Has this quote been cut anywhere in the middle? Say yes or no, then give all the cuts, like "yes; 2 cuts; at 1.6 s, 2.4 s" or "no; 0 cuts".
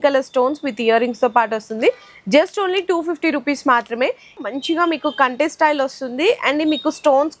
yes; 1 cut; at 4.4 s